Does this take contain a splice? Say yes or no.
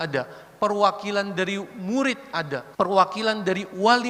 yes